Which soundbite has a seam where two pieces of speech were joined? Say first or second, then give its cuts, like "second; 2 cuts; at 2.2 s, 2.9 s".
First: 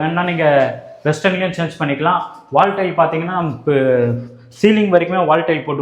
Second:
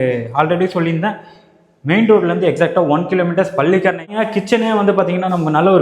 second; 1 cut; at 4.1 s